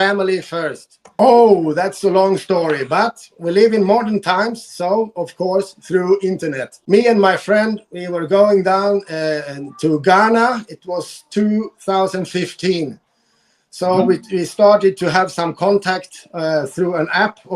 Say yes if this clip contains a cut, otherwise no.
yes